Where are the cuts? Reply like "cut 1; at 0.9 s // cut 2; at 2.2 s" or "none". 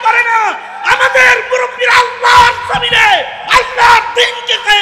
none